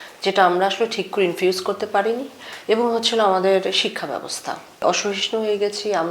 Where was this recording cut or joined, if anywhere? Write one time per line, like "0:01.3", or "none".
0:04.8